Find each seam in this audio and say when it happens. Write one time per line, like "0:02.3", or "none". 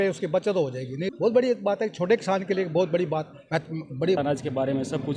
0:01.1
0:04.2